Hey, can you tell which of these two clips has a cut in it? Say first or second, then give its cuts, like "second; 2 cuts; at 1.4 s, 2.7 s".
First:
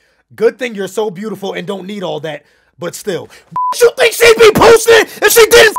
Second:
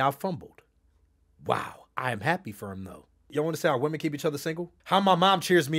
second; 2 cuts; at 3.3 s, 4.7 s